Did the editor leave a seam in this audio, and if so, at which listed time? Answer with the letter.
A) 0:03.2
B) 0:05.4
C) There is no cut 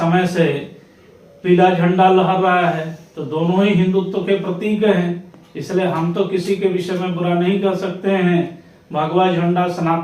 C